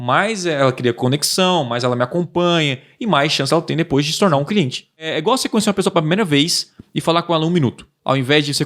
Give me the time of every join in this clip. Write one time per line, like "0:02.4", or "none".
0:05.1